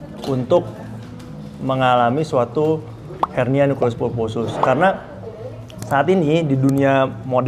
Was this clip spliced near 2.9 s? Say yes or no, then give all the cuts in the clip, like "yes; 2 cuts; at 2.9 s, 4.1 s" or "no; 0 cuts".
no; 0 cuts